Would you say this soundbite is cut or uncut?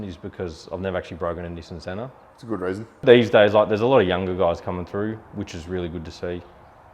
cut